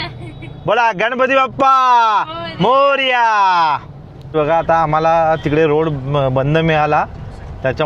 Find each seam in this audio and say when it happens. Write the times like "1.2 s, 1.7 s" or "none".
4.3 s